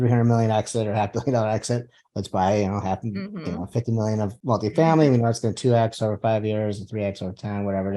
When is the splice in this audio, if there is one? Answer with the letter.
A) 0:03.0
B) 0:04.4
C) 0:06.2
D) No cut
B